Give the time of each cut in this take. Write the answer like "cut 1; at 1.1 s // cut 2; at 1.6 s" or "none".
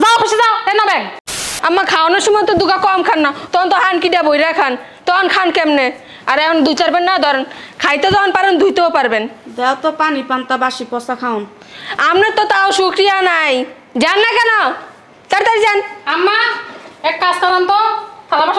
cut 1; at 1.5 s